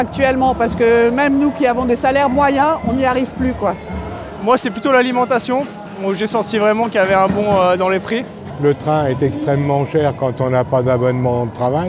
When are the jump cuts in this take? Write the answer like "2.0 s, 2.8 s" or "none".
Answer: 4.3 s, 8.5 s